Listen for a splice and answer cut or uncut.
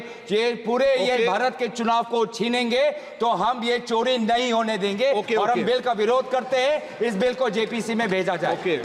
uncut